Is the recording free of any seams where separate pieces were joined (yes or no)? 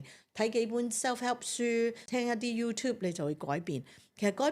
no